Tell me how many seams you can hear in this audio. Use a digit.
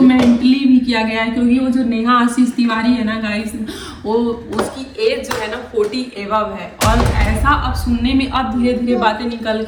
0